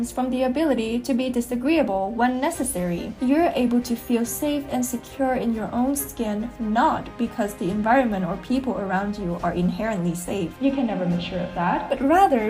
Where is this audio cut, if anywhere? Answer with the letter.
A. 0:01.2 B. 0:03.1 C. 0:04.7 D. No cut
B